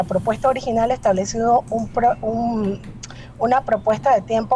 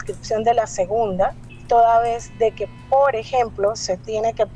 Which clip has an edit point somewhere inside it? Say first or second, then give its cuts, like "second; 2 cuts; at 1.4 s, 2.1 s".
second; 1 cut; at 1.5 s